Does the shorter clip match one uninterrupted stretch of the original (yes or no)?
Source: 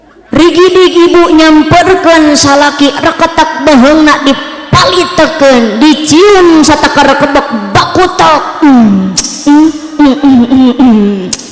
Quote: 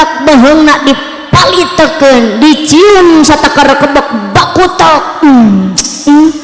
yes